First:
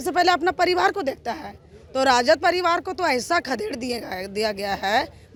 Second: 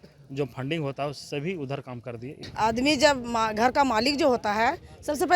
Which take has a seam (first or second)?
second